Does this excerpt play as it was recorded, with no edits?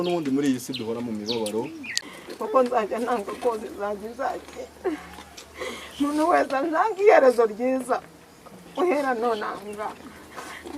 no; 1 cut; at 1.8 s

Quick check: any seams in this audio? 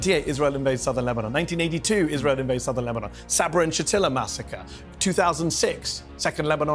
no; 0 cuts

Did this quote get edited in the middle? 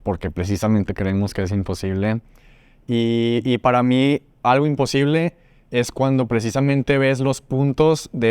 no; 0 cuts

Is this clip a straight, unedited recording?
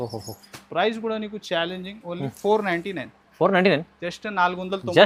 yes; 0 cuts

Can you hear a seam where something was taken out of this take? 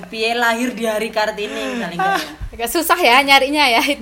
yes; 1 cut; at 2.4 s

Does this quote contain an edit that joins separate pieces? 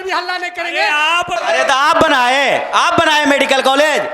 yes; 1 cut; at 1.4 s

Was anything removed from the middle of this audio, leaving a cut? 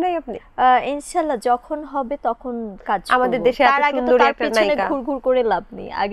no; 0 cuts

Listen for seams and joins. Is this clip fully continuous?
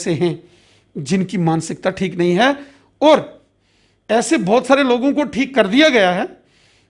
yes; 0 cuts

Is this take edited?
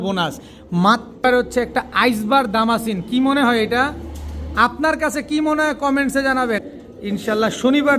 yes; 2 cuts; at 1.2 s, 6.7 s

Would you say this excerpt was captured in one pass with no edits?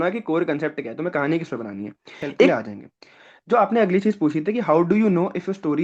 no; 1 cut; at 2.5 s

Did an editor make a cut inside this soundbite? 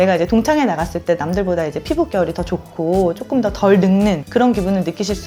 no; 0 cuts

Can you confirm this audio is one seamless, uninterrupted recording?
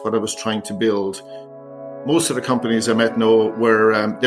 no; 1 cut; at 1.4 s

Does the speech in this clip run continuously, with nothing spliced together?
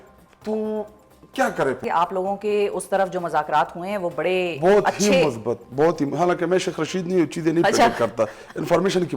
no; 1 cut; at 1.8 s

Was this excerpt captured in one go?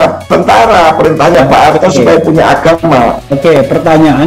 no; 1 cut; at 2.8 s

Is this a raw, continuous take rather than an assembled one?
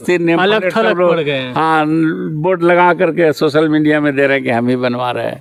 yes; 0 cuts

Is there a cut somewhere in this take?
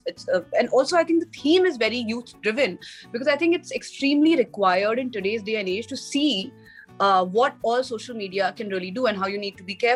no; 0 cuts

